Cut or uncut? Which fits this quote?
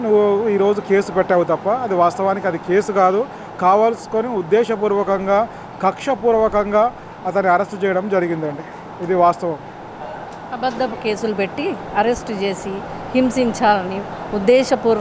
uncut